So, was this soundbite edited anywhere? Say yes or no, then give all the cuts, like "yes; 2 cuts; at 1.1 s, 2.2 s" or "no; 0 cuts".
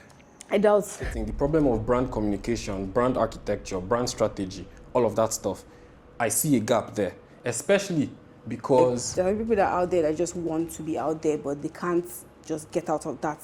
yes; 2 cuts; at 1.1 s, 9.0 s